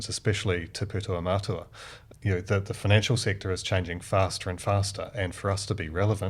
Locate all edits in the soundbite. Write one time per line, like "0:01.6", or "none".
0:02.0

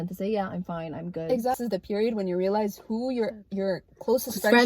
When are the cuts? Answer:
0:01.6

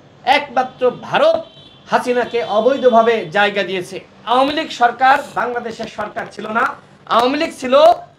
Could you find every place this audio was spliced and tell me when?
0:04.2

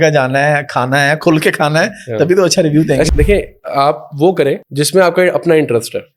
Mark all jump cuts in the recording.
0:03.1
0:04.6

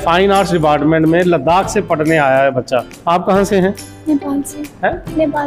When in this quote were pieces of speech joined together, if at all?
0:02.9

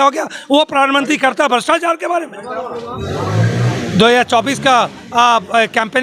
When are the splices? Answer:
0:02.9

